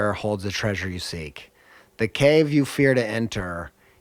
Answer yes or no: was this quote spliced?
no